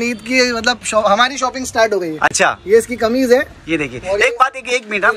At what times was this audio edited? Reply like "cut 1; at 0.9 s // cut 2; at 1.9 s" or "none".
none

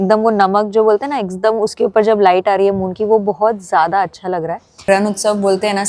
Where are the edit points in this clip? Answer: cut 1; at 4.8 s

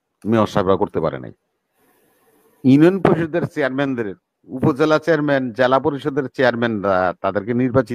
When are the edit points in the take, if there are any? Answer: none

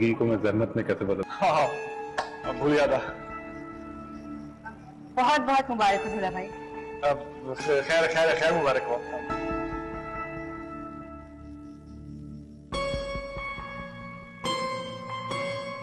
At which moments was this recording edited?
cut 1; at 1.3 s

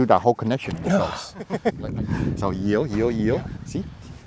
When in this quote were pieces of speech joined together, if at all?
cut 1; at 1.5 s

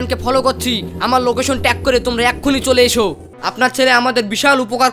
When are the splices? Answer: cut 1; at 3.4 s

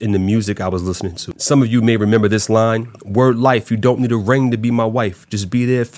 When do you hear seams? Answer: cut 1; at 1.3 s

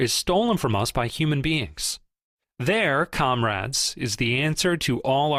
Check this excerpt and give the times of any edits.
none

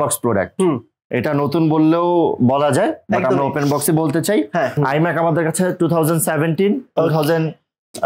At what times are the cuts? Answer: cut 1; at 4.8 s

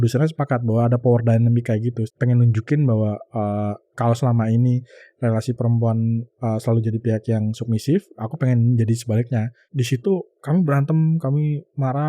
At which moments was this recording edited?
cut 1; at 2.1 s // cut 2; at 9.7 s

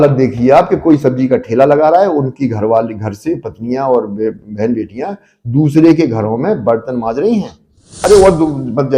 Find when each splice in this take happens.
cut 1; at 8.0 s

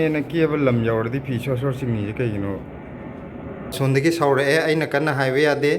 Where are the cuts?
cut 1; at 3.8 s

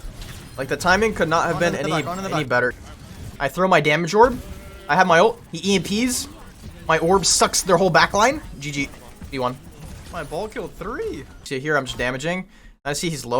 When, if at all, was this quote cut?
cut 1; at 2.9 s // cut 2; at 11.4 s

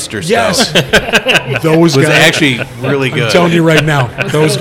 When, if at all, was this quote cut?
none

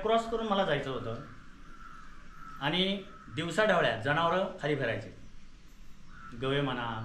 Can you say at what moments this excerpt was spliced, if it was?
none

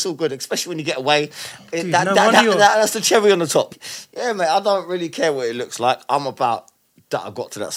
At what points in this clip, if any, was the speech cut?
cut 1; at 3.7 s

